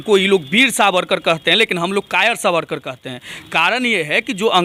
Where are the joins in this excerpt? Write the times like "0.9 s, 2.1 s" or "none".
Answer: none